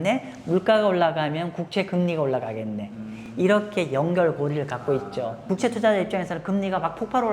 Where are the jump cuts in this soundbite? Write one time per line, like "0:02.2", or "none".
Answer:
0:05.4